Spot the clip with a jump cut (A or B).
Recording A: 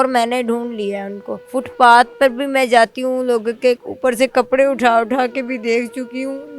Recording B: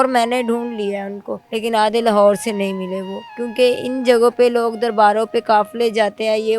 A